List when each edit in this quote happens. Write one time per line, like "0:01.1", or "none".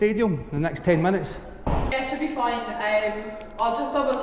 0:01.9